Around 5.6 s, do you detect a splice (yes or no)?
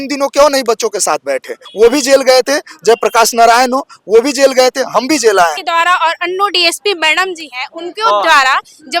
yes